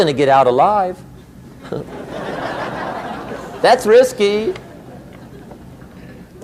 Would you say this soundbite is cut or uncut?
uncut